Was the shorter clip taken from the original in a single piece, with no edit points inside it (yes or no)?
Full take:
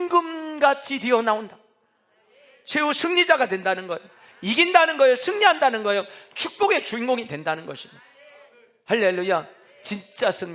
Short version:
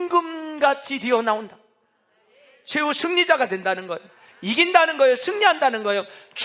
yes